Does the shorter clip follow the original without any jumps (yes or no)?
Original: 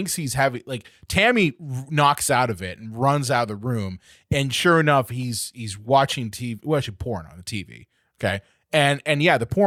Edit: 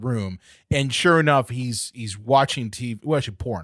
yes